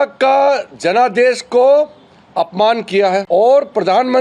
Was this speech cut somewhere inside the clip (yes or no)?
yes